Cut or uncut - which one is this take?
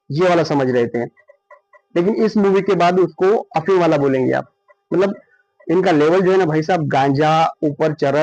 uncut